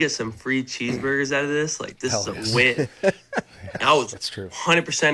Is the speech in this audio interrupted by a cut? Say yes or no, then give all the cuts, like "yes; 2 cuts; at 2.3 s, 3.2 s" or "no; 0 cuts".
no; 0 cuts